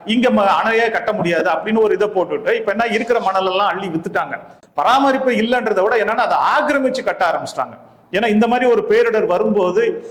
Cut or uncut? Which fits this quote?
cut